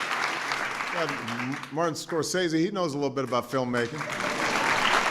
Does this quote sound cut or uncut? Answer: cut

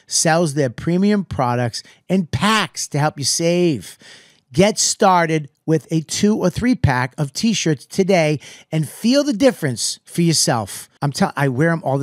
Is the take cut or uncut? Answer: uncut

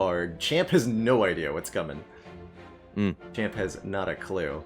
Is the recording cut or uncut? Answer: uncut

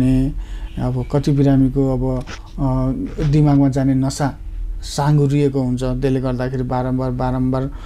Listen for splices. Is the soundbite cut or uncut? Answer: uncut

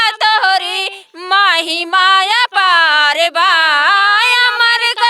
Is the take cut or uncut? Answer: uncut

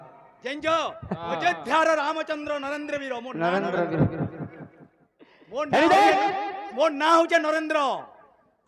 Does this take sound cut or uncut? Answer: uncut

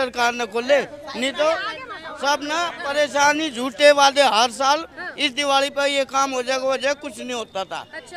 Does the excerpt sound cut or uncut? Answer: uncut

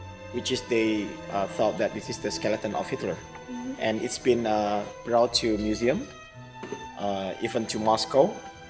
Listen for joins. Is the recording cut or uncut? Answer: uncut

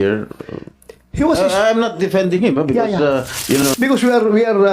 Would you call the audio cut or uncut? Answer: cut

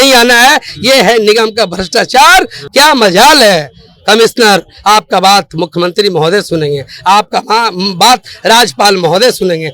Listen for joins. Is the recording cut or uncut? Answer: cut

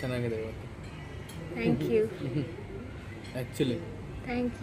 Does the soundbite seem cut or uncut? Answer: uncut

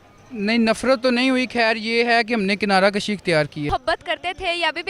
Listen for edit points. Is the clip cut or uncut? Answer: cut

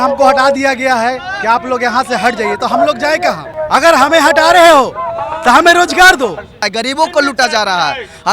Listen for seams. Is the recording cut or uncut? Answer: cut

